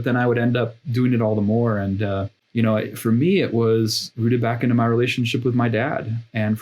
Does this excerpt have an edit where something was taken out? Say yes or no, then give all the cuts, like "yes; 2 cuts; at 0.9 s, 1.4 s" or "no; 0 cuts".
yes; 1 cut; at 2.4 s